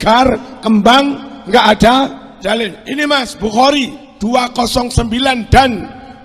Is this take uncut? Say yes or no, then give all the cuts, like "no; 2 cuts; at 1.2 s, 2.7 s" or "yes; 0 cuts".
no; 2 cuts; at 2.3 s, 4.0 s